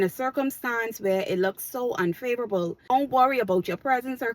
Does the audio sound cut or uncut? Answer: cut